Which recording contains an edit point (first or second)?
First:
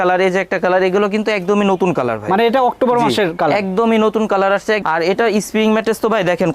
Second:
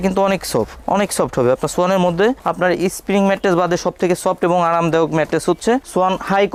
first